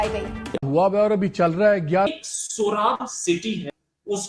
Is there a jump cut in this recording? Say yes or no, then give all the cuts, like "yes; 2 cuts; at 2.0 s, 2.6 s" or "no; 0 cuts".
yes; 1 cut; at 2.1 s